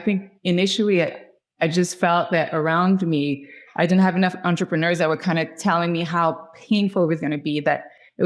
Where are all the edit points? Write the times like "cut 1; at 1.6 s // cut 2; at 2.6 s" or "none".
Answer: none